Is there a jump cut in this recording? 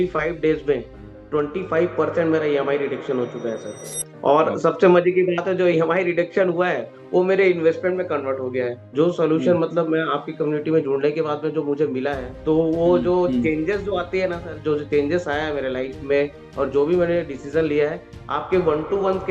yes; 2 cuts; at 8.8 s, 12.3 s

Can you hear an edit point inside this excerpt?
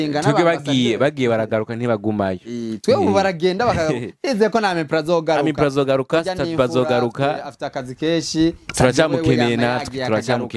no; 0 cuts

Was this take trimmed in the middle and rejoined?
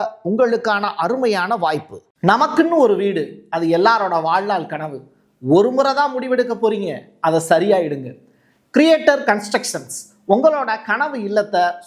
yes; 1 cut; at 2.0 s

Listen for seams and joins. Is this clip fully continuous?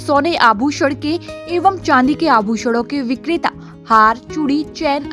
yes; 0 cuts

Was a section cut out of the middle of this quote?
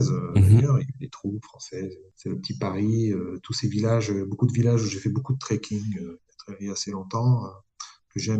yes; 1 cut; at 2.1 s

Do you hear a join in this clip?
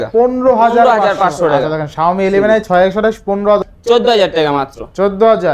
yes; 1 cut; at 3.7 s

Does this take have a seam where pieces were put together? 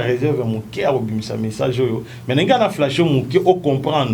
no; 0 cuts

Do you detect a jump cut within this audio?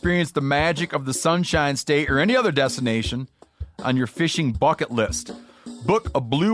no; 0 cuts

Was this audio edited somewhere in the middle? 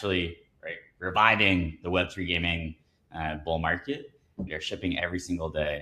yes; 1 cut; at 4.4 s

